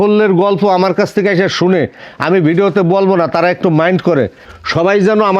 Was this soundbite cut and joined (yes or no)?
no